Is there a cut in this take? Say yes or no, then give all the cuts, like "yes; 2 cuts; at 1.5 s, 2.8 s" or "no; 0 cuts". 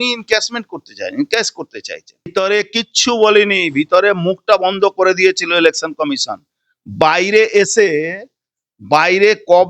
yes; 1 cut; at 2.3 s